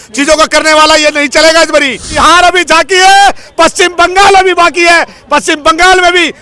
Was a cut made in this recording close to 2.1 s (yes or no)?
yes